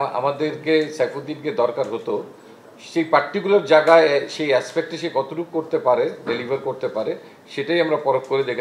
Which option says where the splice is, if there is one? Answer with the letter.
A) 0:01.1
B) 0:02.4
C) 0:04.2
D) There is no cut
D